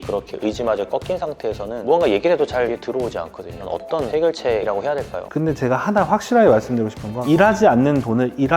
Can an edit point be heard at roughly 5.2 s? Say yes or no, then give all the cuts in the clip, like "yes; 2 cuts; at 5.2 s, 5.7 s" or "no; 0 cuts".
yes; 1 cut; at 5.2 s